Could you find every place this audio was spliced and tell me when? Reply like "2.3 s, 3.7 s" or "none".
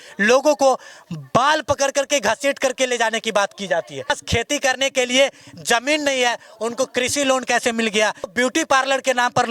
4.2 s, 8.3 s